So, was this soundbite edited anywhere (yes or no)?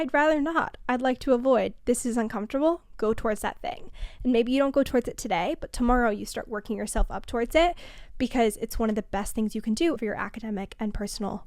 yes